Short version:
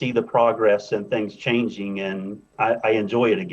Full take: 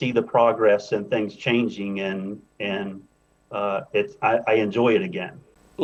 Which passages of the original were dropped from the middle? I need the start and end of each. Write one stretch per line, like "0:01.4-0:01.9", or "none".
0:02.5-0:04.1